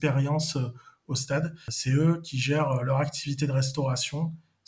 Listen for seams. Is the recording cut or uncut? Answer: cut